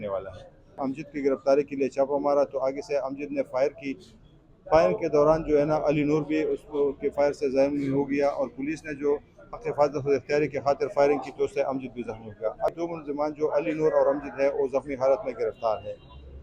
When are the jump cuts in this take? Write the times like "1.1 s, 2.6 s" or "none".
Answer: 0.8 s, 12.7 s

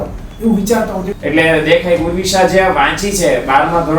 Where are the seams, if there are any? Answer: 1.1 s

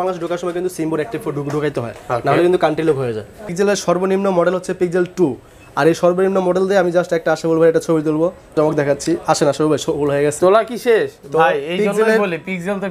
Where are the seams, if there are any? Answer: 3.5 s, 8.5 s

